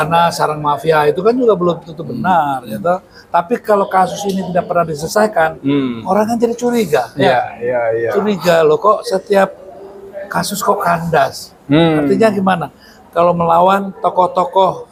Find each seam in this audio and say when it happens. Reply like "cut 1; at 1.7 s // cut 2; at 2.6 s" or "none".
none